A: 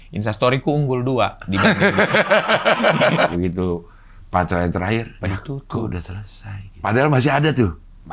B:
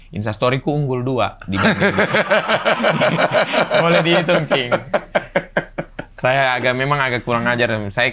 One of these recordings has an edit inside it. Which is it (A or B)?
A